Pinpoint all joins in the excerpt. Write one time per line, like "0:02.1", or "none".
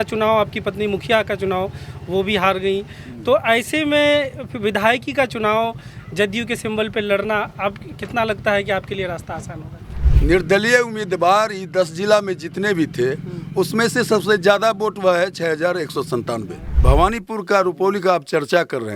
0:10.0
0:16.7